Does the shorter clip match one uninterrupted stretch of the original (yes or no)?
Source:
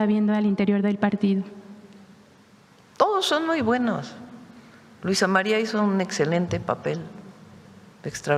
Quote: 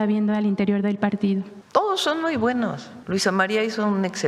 no